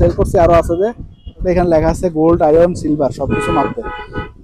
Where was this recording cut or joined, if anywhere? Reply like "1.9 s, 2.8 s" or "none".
1.4 s